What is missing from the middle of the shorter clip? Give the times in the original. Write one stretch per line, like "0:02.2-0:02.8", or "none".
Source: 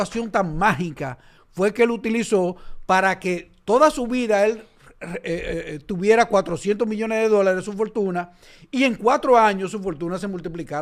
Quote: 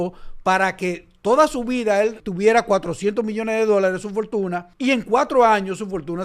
0:04.7-0:05.9
0:08.3-0:08.6